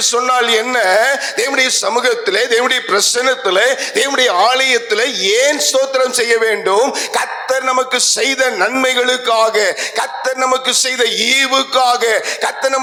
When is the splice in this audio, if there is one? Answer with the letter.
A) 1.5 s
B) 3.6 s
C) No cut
C